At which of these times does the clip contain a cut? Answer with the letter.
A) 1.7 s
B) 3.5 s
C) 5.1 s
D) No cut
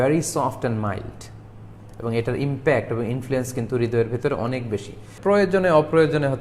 C